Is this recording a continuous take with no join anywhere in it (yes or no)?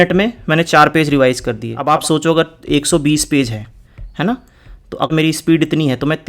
no